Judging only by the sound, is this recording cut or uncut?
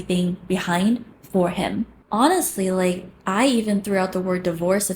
cut